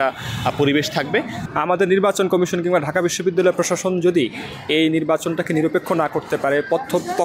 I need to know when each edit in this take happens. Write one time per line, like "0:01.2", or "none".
0:01.4